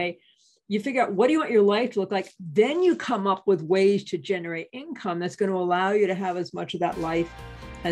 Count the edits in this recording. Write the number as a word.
zero